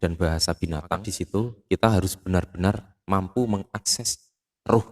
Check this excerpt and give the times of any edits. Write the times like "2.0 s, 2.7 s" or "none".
1.1 s